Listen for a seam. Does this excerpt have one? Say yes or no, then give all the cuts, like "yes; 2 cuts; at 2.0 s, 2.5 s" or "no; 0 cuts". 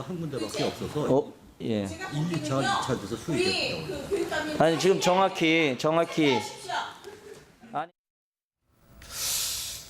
yes; 1 cut; at 1.9 s